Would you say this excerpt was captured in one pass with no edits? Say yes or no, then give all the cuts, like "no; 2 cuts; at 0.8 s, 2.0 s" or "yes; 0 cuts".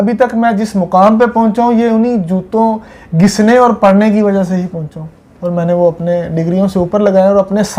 yes; 0 cuts